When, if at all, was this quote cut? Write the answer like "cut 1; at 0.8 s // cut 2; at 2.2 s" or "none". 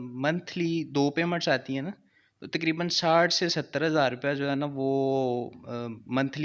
none